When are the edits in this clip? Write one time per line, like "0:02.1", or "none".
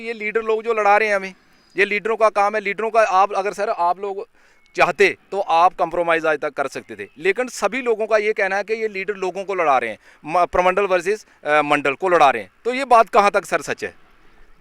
none